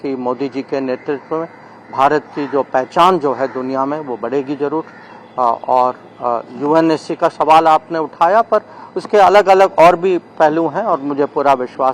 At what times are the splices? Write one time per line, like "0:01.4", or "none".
none